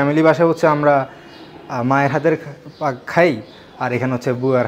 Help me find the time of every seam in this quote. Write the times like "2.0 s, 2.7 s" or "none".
none